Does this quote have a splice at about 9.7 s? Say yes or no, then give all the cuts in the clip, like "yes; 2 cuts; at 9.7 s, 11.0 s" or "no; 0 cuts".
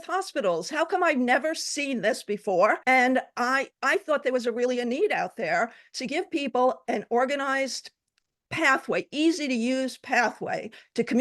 no; 1 cut; at 2.8 s